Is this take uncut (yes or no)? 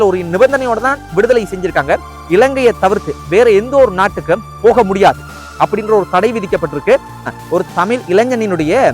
no